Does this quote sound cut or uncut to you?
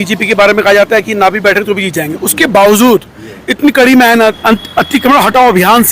cut